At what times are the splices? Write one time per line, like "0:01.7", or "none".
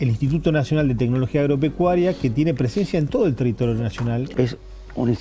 0:04.3